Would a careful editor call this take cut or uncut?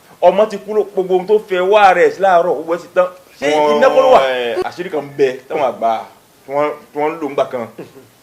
cut